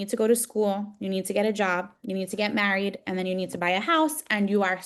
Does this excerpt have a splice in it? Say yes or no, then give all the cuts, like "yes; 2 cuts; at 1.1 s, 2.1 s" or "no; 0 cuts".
no; 0 cuts